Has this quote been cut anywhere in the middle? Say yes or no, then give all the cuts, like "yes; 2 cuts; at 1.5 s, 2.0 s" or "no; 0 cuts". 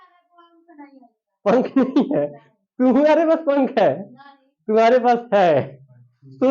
no; 0 cuts